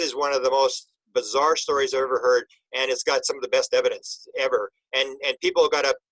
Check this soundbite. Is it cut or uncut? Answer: uncut